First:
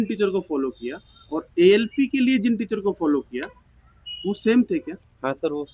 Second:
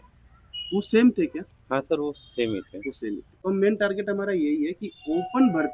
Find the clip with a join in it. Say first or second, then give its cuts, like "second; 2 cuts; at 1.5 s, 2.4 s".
second; 1 cut; at 3.4 s